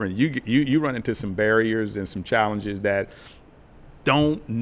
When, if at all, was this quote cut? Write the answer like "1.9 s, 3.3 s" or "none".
none